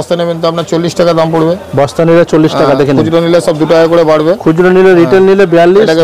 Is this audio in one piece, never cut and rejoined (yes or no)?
yes